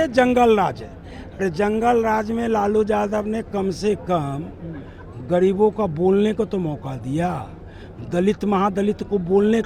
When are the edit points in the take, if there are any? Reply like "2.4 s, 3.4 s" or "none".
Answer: none